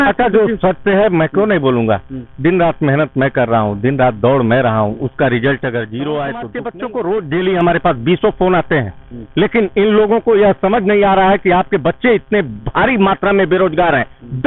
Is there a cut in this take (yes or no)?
yes